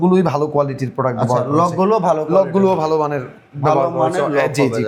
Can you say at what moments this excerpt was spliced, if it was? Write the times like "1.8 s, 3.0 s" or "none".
none